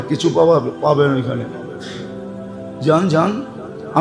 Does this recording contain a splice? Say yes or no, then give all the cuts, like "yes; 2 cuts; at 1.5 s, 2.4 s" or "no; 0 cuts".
yes; 2 cuts; at 1.5 s, 2.8 s